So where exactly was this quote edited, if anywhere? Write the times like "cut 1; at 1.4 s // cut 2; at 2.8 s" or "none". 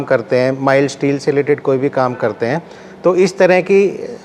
none